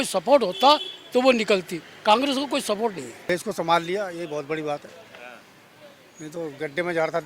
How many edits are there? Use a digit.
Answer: 1